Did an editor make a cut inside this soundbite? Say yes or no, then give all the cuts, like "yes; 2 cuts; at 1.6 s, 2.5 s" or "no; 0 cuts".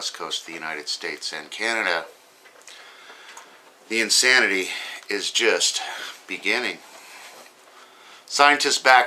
yes; 1 cut; at 1.8 s